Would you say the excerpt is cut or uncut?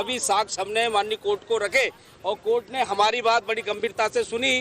cut